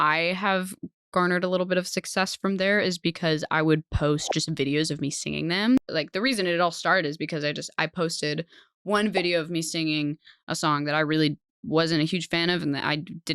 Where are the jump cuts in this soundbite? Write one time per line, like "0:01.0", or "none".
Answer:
0:05.8